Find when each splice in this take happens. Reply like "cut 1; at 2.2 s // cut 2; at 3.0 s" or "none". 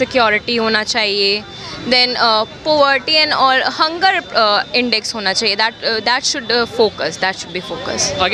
none